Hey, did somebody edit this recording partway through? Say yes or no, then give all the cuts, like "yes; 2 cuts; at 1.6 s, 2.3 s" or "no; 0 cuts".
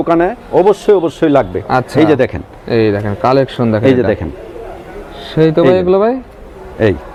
no; 0 cuts